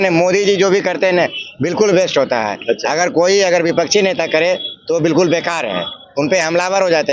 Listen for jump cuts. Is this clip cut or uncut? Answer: uncut